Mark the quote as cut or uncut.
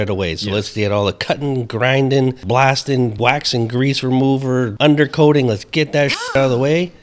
cut